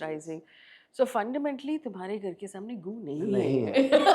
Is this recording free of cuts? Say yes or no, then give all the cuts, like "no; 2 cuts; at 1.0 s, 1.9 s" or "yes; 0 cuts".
yes; 0 cuts